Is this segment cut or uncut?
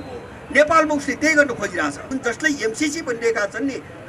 cut